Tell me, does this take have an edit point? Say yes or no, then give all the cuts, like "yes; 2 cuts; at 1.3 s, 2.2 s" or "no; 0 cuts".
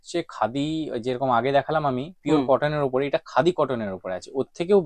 no; 0 cuts